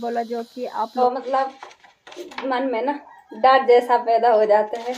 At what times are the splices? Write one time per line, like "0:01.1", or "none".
0:01.0